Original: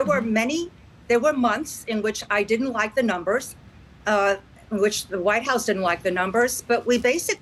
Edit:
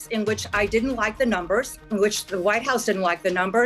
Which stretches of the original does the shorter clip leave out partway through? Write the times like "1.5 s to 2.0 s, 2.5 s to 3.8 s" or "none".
3.5 s to 4.6 s